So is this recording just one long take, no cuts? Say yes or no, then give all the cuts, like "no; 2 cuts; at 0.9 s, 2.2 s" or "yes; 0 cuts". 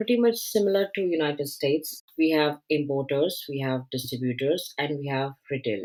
yes; 0 cuts